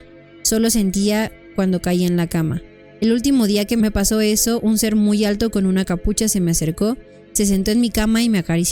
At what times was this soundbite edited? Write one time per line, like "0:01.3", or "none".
0:03.8